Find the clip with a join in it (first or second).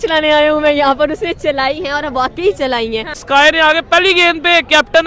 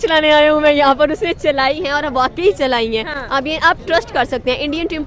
first